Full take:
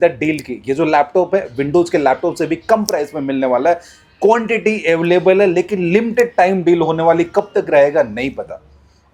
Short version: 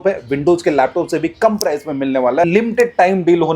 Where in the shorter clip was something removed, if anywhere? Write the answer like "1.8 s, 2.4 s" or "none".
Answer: 2.5 s